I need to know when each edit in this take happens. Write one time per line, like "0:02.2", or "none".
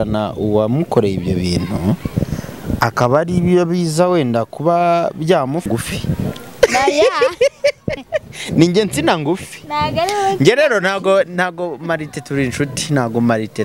0:05.7